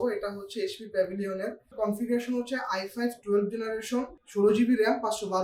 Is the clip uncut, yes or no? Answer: no